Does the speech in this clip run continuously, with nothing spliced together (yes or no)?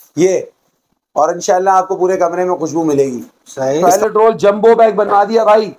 no